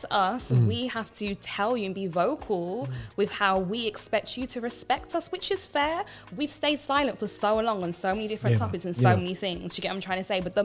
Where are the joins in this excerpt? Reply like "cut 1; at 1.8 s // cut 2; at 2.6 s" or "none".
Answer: none